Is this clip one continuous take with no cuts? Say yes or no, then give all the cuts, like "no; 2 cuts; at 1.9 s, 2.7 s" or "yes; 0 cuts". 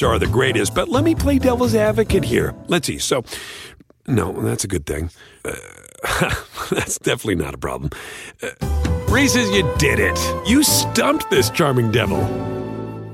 yes; 0 cuts